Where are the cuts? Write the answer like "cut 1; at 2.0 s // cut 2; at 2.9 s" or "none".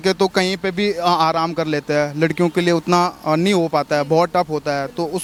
none